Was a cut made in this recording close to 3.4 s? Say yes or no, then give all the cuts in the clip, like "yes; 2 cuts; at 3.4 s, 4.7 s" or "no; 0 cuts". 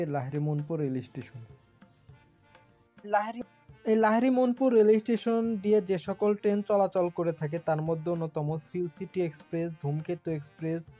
yes; 1 cut; at 3.4 s